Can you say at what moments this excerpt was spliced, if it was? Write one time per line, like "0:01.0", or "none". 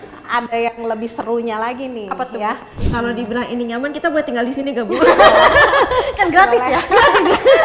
0:02.8